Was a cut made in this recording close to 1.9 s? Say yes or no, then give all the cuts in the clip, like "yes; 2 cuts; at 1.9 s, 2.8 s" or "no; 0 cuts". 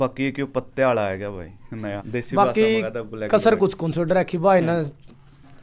yes; 1 cut; at 1.9 s